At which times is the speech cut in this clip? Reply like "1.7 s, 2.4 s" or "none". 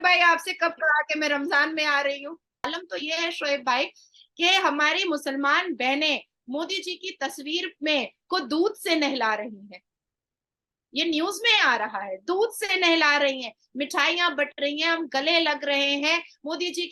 2.7 s